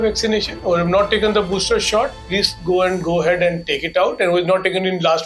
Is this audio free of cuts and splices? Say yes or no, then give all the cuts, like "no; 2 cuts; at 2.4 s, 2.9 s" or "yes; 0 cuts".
yes; 0 cuts